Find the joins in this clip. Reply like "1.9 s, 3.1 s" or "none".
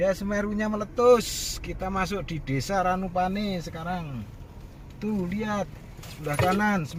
none